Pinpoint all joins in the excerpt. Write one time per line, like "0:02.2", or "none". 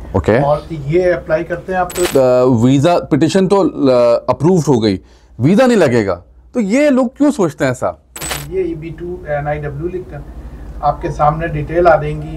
0:02.1
0:08.4